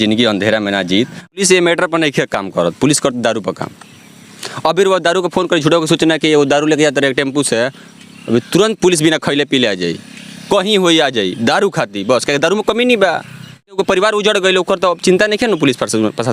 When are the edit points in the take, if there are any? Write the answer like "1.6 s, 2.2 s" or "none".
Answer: 1.4 s, 13.8 s